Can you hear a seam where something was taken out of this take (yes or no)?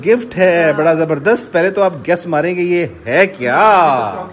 no